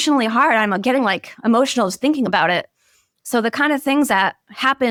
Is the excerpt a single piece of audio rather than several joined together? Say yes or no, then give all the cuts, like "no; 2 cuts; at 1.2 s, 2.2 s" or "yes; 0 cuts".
yes; 0 cuts